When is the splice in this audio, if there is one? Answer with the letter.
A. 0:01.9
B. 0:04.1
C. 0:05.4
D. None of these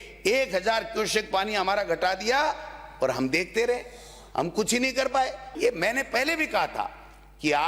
C